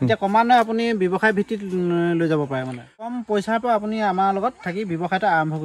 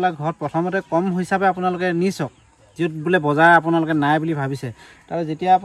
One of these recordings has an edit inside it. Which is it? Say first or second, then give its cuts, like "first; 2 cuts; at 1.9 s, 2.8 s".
first; 1 cut; at 3.1 s